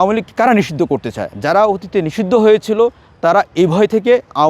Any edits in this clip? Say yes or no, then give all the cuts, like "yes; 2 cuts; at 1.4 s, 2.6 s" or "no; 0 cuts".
no; 0 cuts